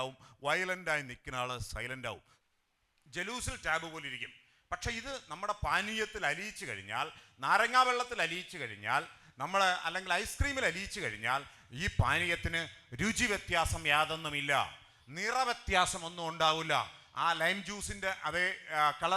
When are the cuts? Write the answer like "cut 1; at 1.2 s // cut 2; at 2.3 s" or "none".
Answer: cut 1; at 2.3 s

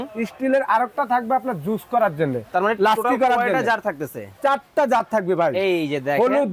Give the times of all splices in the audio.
none

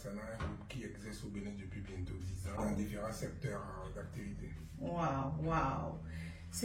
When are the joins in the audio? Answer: cut 1; at 2.6 s

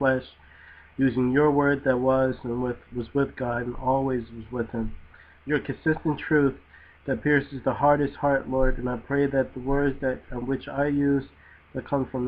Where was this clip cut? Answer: cut 1; at 7.9 s

